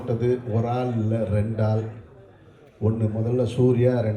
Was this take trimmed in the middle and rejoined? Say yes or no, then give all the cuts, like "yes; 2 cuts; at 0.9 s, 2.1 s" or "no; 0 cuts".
no; 0 cuts